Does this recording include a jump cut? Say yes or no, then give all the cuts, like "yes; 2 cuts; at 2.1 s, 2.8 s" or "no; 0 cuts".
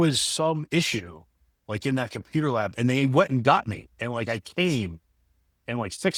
no; 0 cuts